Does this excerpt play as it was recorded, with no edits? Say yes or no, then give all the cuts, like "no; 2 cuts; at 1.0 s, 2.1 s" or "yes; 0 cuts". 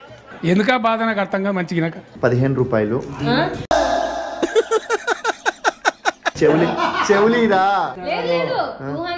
no; 2 cuts; at 2.0 s, 8.0 s